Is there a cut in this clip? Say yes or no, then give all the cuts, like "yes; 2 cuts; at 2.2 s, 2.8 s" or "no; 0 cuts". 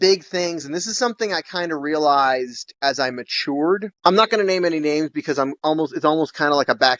no; 0 cuts